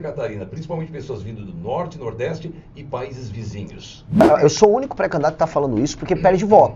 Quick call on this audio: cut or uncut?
cut